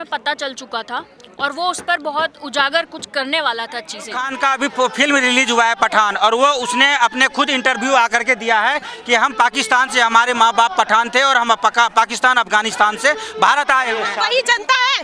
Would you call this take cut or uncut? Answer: cut